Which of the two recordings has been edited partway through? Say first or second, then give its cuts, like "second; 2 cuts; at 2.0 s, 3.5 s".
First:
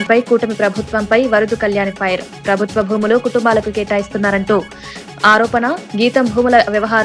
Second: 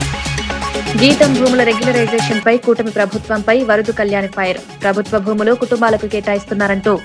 second; 1 cut; at 0.9 s